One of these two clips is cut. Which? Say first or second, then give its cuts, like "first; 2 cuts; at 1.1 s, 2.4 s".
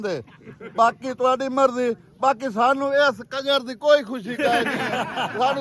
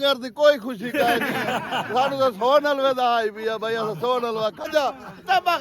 second; 1 cut; at 4.6 s